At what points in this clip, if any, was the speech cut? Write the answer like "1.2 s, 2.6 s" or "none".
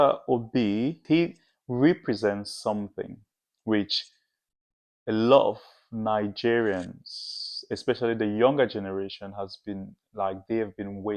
1.0 s